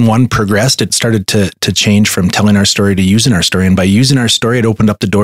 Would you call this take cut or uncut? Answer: cut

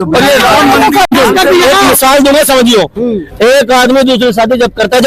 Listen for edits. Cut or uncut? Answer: cut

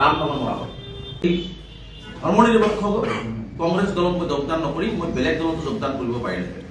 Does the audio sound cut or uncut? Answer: cut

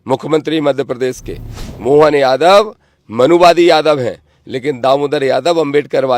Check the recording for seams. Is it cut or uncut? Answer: uncut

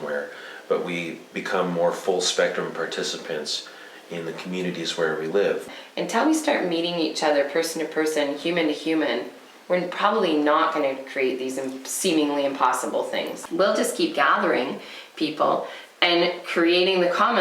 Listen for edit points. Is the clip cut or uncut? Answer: cut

